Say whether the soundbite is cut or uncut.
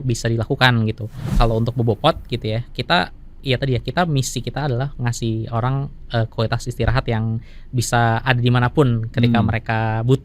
cut